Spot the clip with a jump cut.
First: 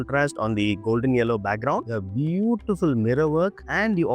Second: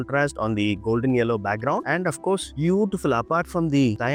first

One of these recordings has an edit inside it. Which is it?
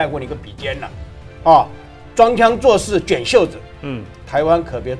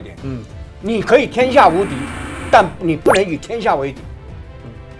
second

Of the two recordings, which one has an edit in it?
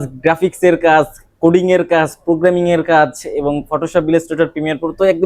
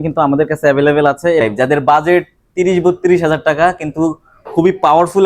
second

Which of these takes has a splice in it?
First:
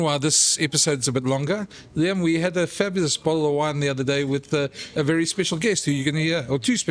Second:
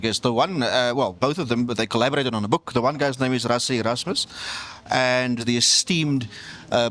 second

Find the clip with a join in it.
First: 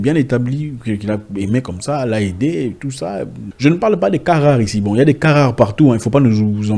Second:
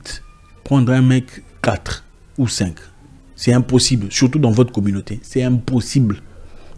first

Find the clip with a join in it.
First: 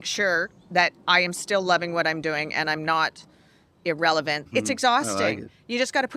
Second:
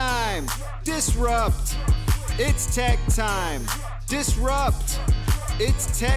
first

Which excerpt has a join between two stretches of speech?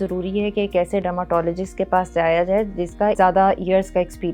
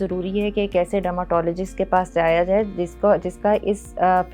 first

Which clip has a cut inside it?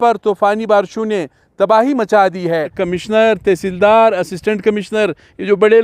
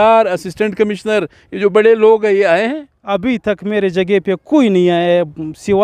first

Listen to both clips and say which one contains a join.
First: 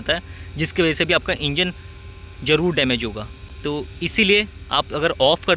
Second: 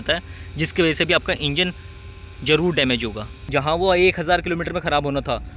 second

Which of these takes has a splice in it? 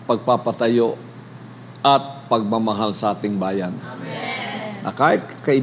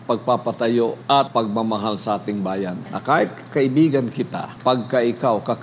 second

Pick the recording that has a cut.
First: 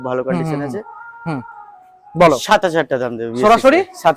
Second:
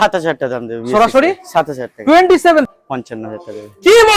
second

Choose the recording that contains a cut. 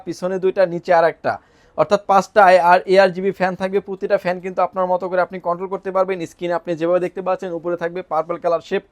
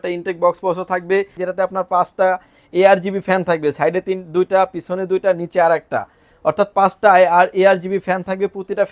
second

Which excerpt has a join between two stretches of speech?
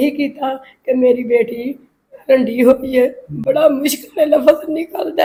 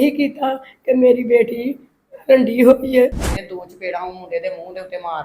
second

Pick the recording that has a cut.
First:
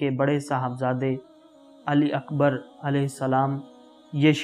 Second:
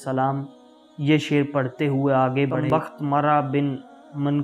second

